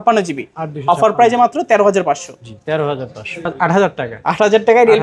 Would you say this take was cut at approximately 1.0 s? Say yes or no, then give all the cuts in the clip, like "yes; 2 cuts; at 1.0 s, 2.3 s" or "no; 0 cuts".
no; 1 cut; at 3.5 s